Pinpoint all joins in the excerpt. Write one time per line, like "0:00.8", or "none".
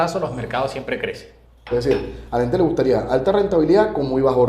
0:01.7